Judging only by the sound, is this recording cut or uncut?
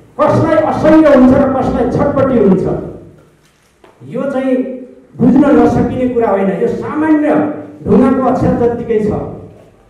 uncut